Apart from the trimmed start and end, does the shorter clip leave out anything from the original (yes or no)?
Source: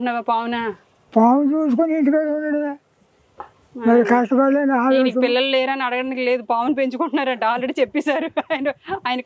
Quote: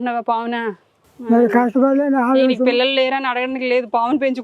yes